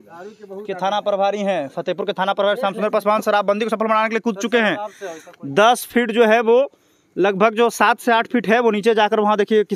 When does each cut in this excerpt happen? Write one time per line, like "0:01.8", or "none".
none